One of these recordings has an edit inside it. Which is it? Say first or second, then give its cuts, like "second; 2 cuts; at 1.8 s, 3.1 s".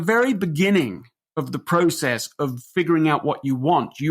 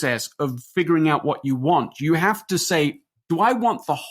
second; 1 cut; at 3.1 s